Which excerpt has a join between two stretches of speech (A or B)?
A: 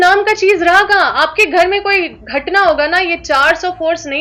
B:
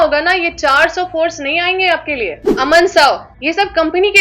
B